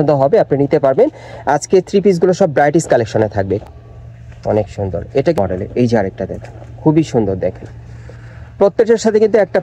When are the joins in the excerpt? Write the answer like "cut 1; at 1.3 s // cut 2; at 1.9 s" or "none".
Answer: cut 1; at 3.6 s // cut 2; at 5.4 s